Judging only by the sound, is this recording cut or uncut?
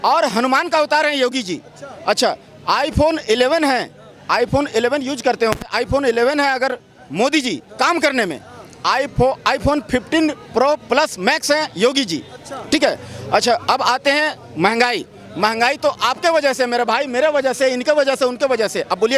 uncut